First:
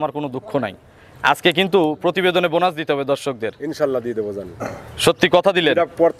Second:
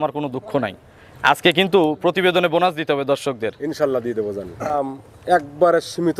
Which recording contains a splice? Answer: second; 1 cut; at 4.7 s

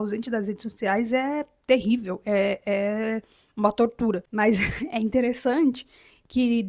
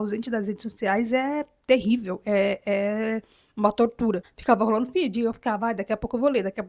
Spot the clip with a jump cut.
second; 1 cut; at 4.3 s

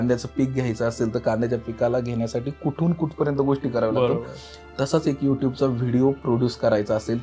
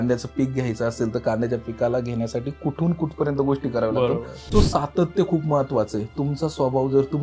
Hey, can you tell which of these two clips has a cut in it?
second; 1 cut; at 4.3 s

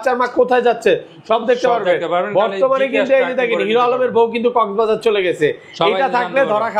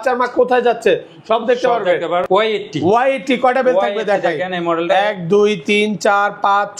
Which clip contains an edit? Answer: second; 1 cut; at 2.2 s

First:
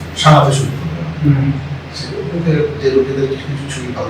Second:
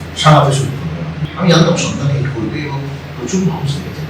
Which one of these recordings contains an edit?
second; 1 cut; at 1.1 s

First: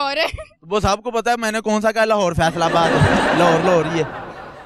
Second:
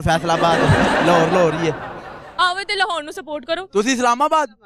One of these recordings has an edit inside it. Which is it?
second; 1 cut; at 3.7 s

